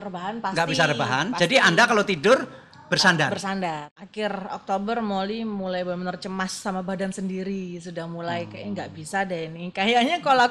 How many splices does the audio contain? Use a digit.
1